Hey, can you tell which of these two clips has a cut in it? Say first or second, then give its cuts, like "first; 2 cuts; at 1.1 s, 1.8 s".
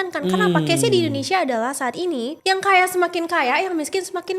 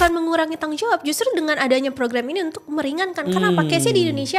first; 1 cut; at 2.4 s